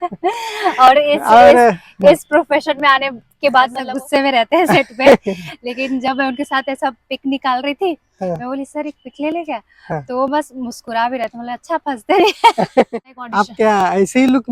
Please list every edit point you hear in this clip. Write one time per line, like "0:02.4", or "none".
0:03.8
0:12.9